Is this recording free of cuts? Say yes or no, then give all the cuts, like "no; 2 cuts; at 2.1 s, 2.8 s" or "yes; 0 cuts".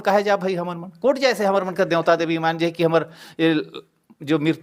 yes; 0 cuts